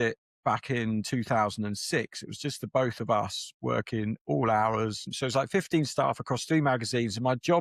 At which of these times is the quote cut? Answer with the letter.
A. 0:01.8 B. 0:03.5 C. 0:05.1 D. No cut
C